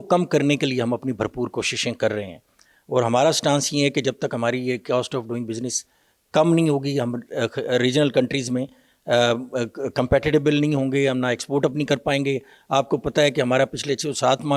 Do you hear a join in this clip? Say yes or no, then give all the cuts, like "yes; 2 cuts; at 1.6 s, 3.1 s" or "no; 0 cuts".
no; 0 cuts